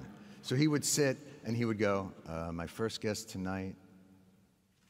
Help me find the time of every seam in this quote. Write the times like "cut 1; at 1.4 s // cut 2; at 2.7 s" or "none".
cut 1; at 1.8 s